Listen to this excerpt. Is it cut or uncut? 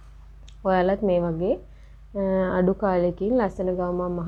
uncut